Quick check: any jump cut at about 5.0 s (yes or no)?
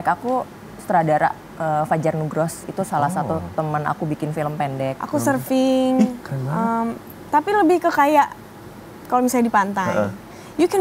yes